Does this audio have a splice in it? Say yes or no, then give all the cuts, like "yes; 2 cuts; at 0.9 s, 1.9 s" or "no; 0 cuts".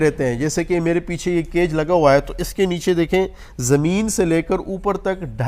no; 0 cuts